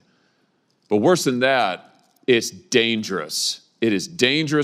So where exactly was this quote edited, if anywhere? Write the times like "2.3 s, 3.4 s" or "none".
none